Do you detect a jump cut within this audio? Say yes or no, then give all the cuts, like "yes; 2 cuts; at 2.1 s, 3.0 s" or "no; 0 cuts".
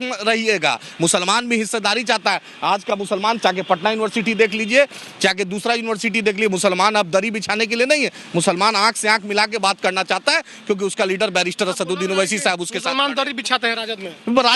no; 0 cuts